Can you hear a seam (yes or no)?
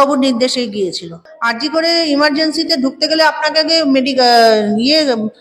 yes